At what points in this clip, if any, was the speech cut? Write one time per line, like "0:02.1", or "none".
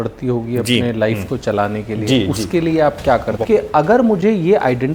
0:03.4